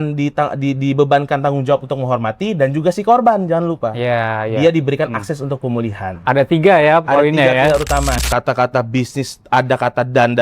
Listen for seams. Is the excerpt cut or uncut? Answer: cut